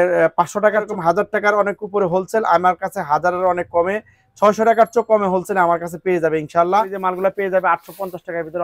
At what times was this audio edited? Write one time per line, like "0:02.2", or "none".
0:00.9
0:06.9